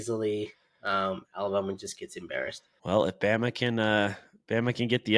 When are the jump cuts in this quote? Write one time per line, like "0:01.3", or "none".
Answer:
0:02.7